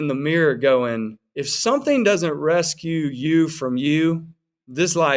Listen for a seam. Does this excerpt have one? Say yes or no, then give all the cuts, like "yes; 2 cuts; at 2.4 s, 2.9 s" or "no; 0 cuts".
no; 0 cuts